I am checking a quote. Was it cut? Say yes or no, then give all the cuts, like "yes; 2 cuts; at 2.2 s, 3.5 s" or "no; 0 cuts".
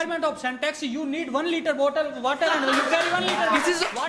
no; 0 cuts